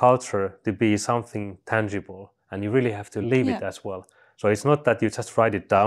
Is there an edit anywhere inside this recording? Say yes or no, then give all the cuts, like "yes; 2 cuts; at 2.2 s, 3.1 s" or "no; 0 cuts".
yes; 1 cut; at 3.1 s